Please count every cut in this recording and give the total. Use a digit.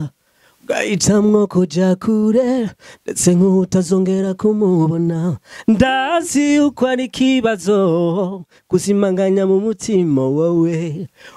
0